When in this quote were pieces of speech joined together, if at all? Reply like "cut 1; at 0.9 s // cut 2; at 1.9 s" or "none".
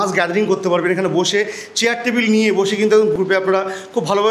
cut 1; at 3.1 s